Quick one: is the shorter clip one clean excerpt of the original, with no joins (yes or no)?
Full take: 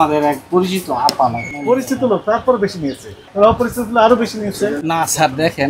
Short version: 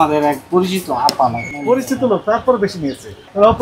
yes